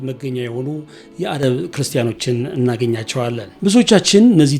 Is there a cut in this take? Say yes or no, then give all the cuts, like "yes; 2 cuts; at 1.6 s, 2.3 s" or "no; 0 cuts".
yes; 1 cut; at 3.6 s